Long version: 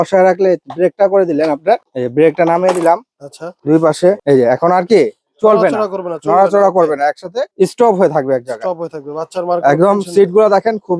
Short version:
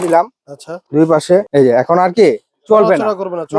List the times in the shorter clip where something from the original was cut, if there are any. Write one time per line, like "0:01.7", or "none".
none